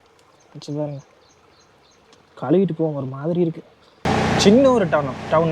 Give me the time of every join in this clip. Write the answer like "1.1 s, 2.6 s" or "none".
4.0 s